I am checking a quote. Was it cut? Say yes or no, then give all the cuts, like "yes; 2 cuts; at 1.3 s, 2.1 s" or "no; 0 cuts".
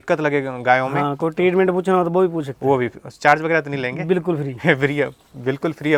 no; 0 cuts